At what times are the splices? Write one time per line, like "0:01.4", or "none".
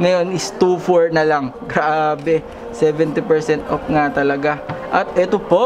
none